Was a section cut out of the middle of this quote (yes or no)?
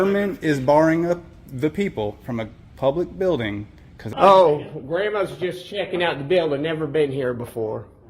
yes